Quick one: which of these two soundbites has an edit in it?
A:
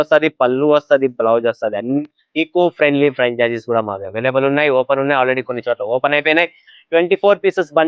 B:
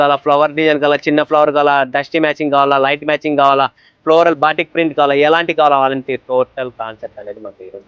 A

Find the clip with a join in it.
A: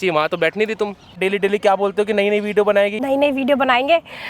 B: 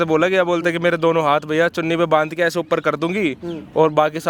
A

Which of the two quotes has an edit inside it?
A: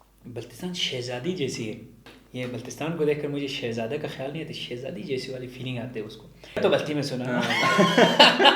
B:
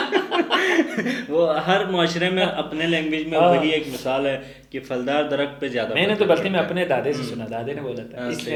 A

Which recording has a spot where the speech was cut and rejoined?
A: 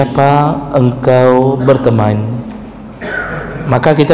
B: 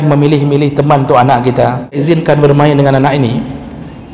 B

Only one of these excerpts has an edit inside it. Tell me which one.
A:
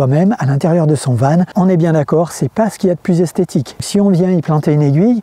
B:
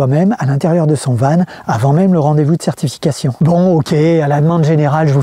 A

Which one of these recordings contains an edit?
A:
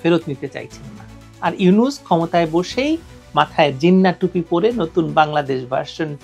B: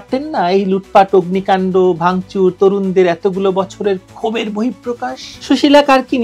B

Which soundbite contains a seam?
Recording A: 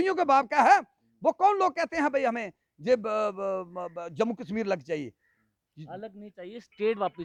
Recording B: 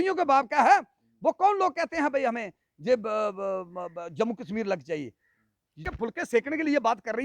B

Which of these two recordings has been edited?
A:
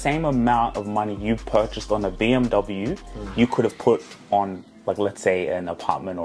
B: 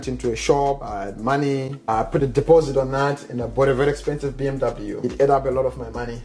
B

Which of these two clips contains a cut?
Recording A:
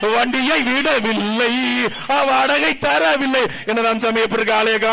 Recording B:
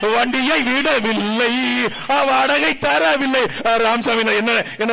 A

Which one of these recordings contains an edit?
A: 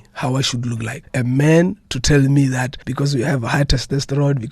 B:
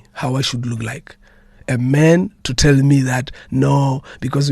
A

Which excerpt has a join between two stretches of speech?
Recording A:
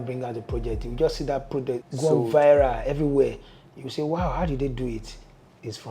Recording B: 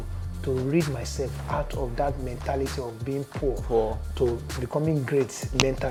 A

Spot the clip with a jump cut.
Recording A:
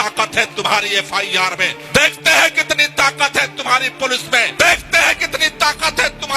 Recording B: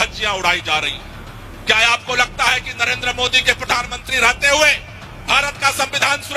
A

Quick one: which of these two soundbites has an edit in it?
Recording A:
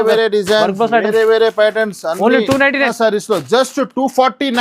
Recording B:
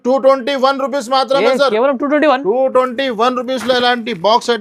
A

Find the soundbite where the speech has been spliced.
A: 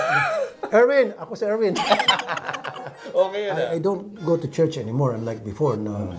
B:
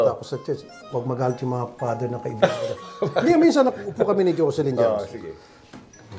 A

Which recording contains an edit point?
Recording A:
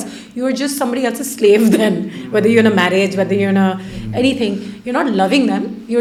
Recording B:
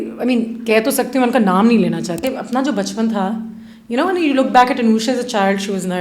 B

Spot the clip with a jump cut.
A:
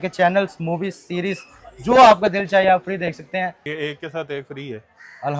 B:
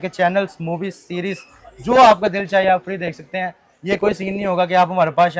A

